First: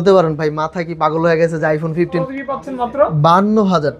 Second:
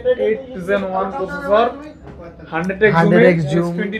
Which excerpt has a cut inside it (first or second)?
first